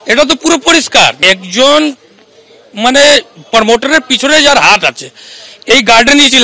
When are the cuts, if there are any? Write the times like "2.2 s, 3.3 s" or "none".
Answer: 1.2 s